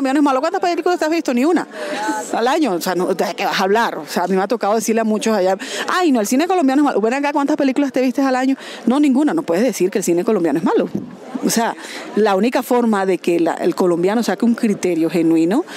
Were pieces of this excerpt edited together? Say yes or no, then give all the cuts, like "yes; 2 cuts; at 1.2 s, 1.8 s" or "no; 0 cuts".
no; 0 cuts